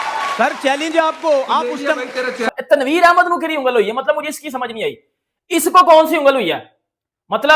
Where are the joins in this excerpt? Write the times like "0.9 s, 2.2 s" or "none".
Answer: 2.5 s